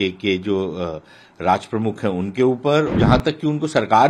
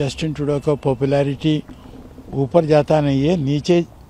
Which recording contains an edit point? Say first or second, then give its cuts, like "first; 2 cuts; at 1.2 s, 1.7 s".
first; 1 cut; at 2.9 s